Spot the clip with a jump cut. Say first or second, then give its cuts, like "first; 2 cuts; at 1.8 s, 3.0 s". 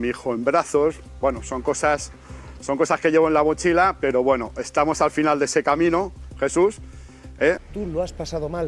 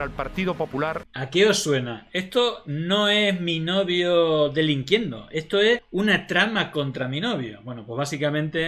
first; 1 cut; at 7.6 s